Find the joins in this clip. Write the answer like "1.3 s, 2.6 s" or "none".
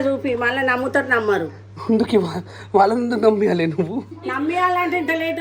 none